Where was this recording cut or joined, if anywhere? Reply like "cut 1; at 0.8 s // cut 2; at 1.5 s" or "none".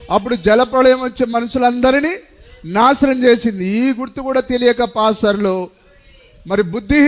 none